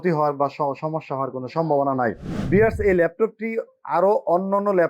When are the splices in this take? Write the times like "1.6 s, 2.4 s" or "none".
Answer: 2.3 s